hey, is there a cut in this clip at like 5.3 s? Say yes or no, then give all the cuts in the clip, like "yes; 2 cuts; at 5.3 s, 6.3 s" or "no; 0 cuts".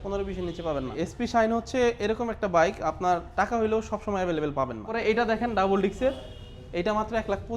yes; 2 cuts; at 1.1 s, 5.3 s